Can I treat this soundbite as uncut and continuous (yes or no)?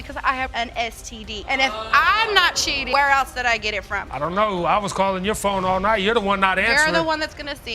yes